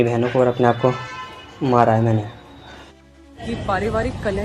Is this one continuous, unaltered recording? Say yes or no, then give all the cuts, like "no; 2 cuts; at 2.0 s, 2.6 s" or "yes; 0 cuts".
no; 1 cut; at 3.3 s